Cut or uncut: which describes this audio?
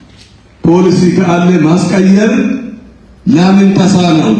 uncut